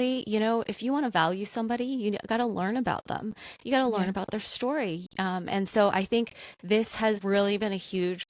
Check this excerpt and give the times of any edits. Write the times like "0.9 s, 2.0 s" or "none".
7.2 s